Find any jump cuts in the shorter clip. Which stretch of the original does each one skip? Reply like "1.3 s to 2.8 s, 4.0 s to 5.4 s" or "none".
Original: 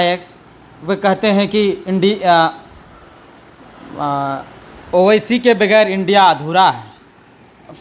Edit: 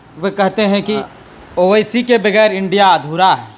1.6 s to 4.3 s